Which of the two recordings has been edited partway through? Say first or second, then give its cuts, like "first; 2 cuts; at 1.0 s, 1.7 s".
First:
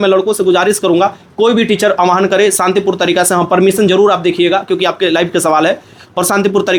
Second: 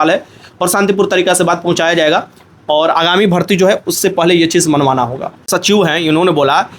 second; 1 cut; at 5.5 s